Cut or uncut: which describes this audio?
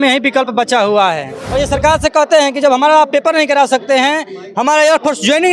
cut